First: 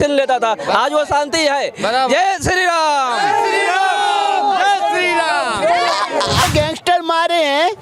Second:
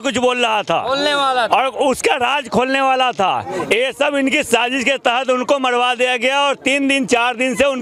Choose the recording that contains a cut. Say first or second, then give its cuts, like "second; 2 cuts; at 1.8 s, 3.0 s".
first; 1 cut; at 6.4 s